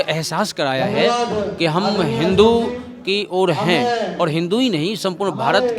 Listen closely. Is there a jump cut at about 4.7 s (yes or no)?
no